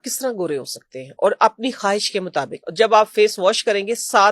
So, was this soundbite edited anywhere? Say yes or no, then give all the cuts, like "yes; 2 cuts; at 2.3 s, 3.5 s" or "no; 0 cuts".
yes; 1 cut; at 2.6 s